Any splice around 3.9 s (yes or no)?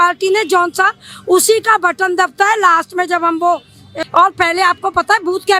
yes